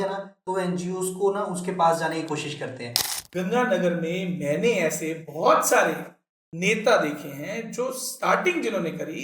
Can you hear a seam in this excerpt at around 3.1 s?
yes; 1 cut; at 3.1 s

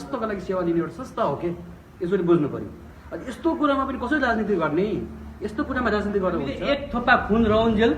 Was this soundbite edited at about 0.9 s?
no; 1 cut; at 6.6 s

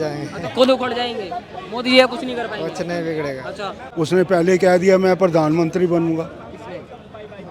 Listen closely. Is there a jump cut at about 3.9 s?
yes; 1 cut; at 3.9 s

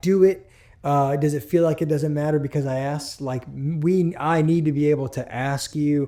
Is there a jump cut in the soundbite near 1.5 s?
no; 0 cuts

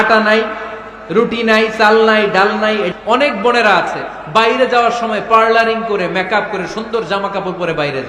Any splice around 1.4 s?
no; 1 cut; at 2.9 s

